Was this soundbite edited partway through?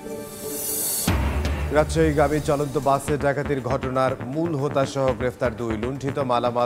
no; 0 cuts

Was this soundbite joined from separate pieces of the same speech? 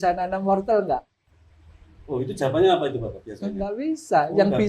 no; 0 cuts

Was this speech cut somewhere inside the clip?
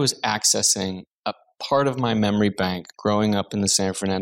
yes; 1 cut; at 1.1 s

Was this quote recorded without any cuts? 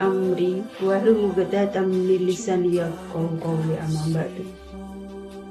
yes; 0 cuts

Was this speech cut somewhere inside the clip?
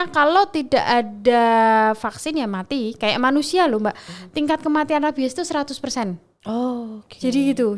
no; 0 cuts

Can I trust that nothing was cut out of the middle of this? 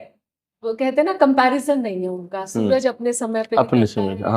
yes; 0 cuts

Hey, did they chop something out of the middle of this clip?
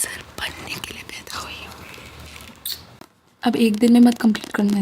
yes; 1 cut; at 3.0 s

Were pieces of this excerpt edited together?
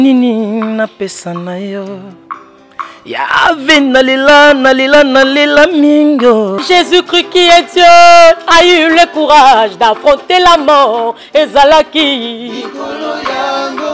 yes; 1 cut; at 6.6 s

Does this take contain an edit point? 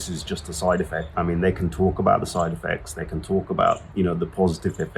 yes; 2 cuts; at 1.1 s, 3.9 s

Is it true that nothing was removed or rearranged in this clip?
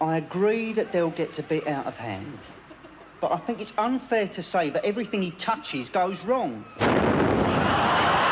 yes; 0 cuts

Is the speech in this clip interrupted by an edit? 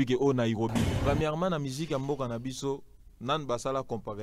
yes; 1 cut; at 0.9 s

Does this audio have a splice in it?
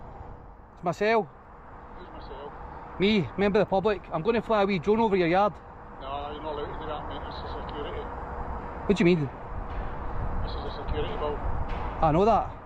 no; 0 cuts

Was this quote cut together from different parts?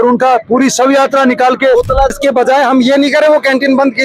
yes; 1 cut; at 2.1 s

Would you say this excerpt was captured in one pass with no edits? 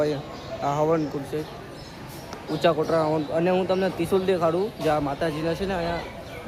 yes; 0 cuts

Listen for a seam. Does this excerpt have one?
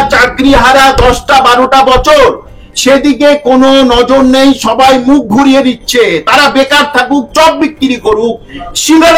no; 0 cuts

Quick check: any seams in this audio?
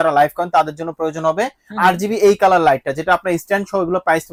no; 0 cuts

